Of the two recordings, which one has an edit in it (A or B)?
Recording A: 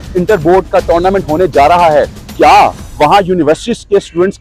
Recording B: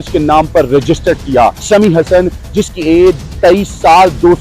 B